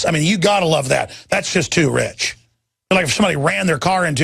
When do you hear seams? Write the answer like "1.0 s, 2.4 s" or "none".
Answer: 3.1 s